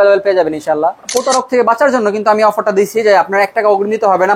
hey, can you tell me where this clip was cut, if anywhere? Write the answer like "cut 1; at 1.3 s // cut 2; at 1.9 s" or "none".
cut 1; at 1.0 s